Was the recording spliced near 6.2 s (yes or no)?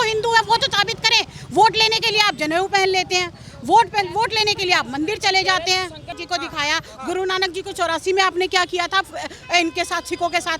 yes